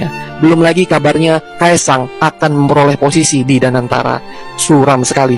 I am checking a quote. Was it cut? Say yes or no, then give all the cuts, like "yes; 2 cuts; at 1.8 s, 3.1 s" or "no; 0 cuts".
no; 0 cuts